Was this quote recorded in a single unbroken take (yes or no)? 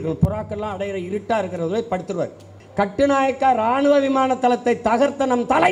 no